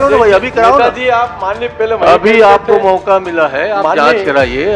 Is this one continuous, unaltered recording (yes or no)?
yes